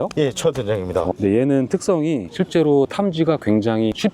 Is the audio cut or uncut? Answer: cut